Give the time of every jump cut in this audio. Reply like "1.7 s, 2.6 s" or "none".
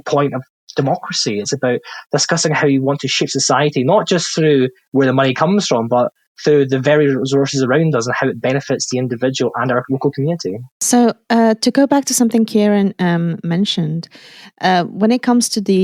none